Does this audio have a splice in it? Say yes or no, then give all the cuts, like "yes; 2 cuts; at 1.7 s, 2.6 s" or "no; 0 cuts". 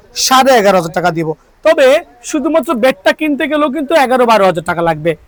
no; 0 cuts